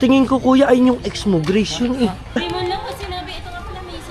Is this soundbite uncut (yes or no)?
no